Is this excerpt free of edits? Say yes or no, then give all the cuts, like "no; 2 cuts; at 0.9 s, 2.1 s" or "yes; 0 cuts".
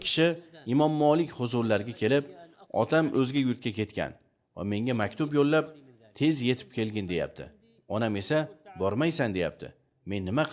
yes; 0 cuts